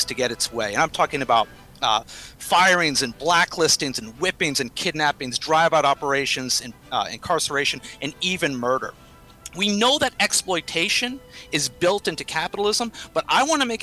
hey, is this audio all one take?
yes; 0 cuts

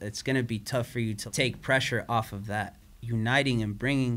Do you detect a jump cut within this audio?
yes; 2 cuts; at 1.2 s, 2.8 s

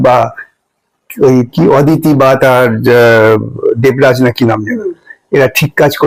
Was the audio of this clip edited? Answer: no; 0 cuts

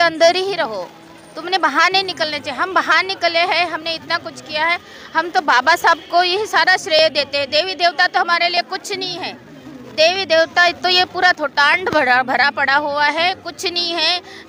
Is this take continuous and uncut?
yes; 0 cuts

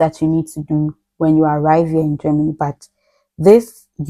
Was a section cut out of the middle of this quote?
no; 0 cuts

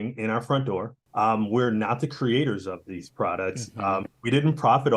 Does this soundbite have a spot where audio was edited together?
yes; 1 cut; at 1.0 s

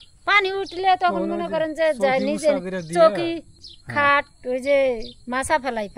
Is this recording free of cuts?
yes; 0 cuts

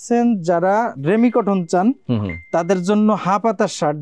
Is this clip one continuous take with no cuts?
yes; 0 cuts

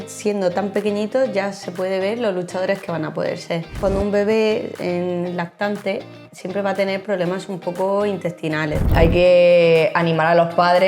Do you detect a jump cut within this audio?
yes; 2 cuts; at 3.7 s, 8.8 s

